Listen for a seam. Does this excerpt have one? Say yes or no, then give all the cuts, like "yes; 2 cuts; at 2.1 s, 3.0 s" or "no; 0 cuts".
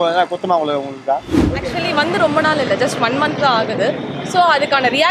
yes; 1 cut; at 1.6 s